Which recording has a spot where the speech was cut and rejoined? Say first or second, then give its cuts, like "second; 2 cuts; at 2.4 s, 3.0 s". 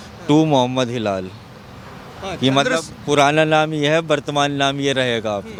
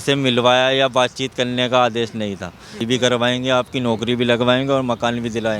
second; 1 cut; at 2.8 s